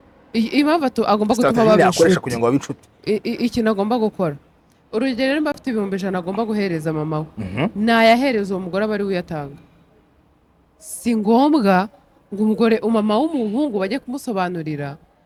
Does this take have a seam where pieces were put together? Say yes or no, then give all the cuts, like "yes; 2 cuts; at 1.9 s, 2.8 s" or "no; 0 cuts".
no; 0 cuts